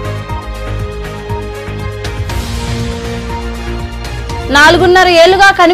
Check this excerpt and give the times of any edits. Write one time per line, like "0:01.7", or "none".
0:02.1